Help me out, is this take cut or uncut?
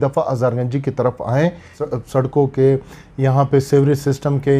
cut